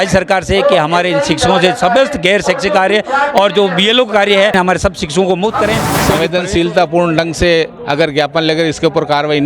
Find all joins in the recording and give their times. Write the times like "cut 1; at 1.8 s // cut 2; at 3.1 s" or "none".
cut 1; at 4.5 s // cut 2; at 5.9 s